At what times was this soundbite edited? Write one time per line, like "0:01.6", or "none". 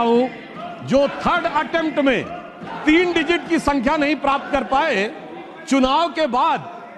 none